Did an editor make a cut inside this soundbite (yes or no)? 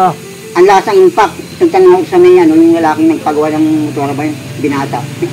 yes